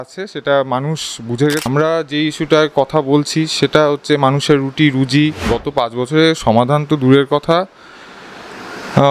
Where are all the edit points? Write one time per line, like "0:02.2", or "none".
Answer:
0:01.7
0:05.6